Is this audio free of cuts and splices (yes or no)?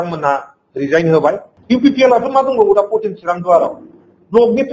no